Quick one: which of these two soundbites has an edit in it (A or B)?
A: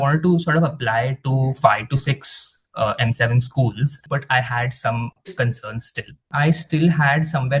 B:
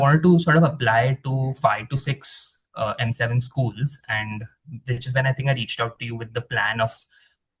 A